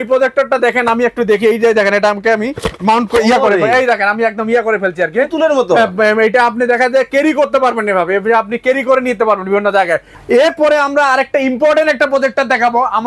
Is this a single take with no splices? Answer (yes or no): no